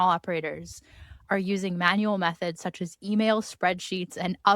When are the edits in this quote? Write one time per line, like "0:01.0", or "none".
none